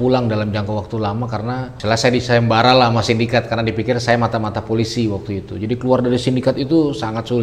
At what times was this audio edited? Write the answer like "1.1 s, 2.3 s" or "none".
1.7 s